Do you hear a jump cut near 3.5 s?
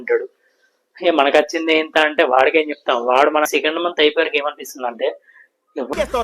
yes; 1 cut; at 3.5 s

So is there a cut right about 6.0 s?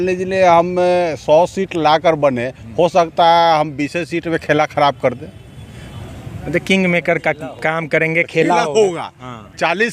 no; 0 cuts

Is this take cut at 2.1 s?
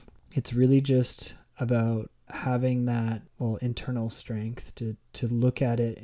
no; 0 cuts

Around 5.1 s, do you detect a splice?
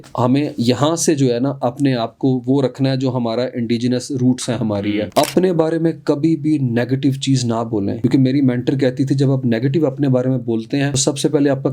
yes; 1 cut; at 5.1 s

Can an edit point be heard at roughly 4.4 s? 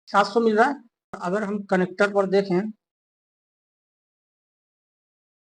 no; 1 cut; at 1.2 s

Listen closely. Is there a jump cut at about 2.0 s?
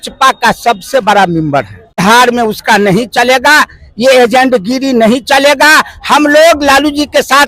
yes; 1 cut; at 2.0 s

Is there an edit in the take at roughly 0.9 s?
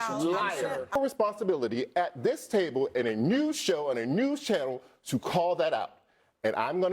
yes; 1 cut; at 0.9 s

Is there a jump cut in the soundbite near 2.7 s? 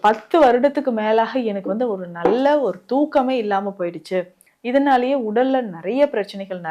no; 0 cuts

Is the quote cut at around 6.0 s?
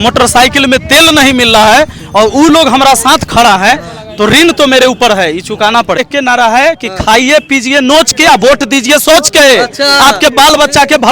yes; 1 cut; at 6.0 s

